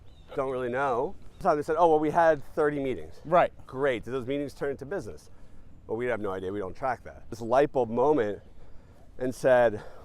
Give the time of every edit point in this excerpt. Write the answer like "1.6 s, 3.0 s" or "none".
1.4 s, 7.4 s